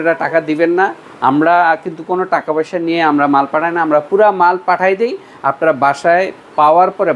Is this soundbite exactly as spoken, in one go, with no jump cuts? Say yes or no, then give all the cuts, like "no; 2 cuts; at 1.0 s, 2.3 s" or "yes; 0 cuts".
yes; 0 cuts